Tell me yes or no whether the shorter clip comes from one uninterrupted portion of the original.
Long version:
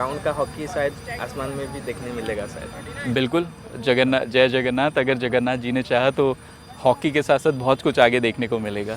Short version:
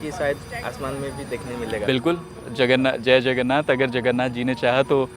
no